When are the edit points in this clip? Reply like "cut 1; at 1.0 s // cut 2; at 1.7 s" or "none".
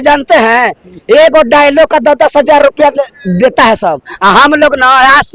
none